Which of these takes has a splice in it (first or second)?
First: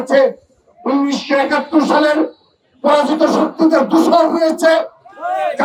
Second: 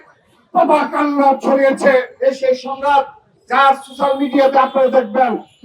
second